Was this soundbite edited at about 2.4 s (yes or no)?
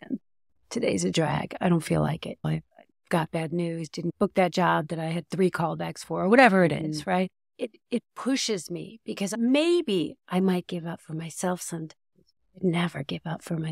yes